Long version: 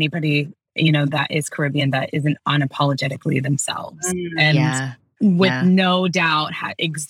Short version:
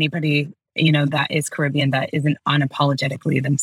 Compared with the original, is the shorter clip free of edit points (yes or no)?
yes